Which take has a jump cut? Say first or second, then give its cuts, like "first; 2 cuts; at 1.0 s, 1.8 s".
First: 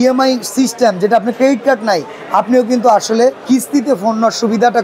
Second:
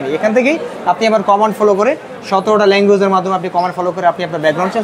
first; 1 cut; at 3.4 s